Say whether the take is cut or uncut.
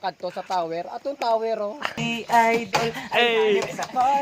cut